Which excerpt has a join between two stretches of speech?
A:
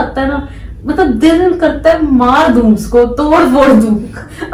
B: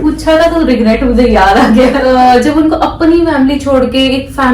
B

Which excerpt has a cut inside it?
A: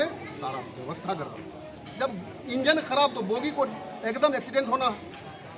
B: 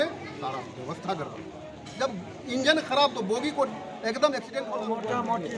B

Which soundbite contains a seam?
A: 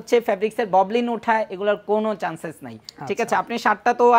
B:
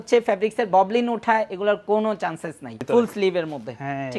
B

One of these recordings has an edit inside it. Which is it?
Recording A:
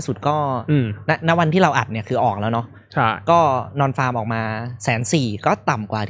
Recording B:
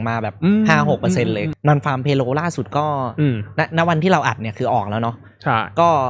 B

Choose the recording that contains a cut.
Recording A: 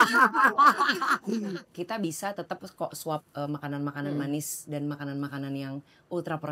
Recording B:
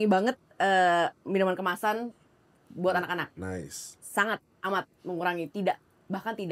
A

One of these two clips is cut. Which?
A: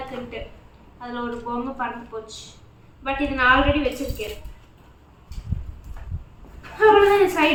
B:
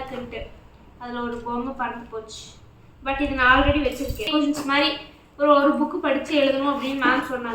B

